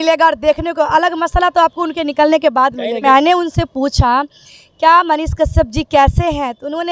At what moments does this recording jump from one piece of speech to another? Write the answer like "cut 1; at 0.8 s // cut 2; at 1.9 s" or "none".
cut 1; at 3.0 s